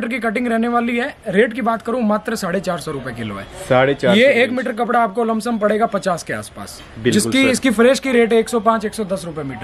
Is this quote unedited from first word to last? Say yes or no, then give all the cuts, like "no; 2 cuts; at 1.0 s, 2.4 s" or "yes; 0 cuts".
yes; 0 cuts